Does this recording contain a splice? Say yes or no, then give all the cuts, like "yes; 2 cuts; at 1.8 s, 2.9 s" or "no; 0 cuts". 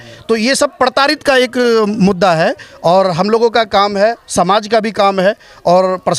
no; 0 cuts